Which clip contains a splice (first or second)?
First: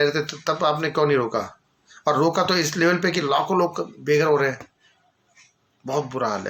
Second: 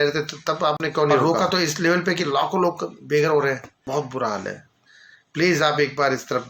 second